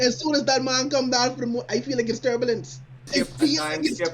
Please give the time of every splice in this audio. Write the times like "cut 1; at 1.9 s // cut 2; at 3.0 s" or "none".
cut 1; at 3.0 s